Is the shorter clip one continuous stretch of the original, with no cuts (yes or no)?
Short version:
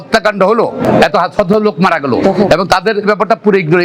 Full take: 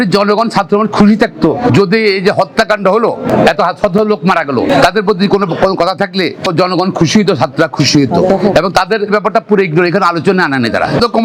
no